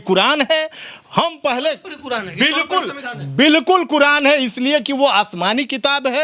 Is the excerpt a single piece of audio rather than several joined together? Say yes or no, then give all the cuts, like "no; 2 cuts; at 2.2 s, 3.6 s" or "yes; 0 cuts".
yes; 0 cuts